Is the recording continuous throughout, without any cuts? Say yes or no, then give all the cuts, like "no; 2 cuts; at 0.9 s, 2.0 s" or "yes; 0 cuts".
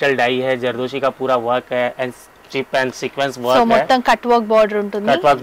yes; 0 cuts